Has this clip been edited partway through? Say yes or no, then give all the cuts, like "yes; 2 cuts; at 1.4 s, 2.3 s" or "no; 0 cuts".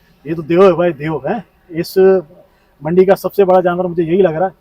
no; 0 cuts